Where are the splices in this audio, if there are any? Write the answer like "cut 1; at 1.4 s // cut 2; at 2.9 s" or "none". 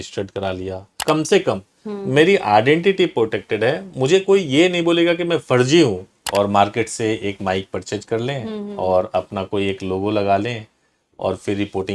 cut 1; at 1.0 s // cut 2; at 6.2 s